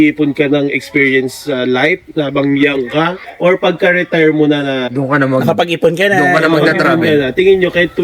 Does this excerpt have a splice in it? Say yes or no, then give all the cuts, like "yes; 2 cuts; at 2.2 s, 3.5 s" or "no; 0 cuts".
no; 0 cuts